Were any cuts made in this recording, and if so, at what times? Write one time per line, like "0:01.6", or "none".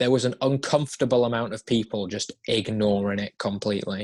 none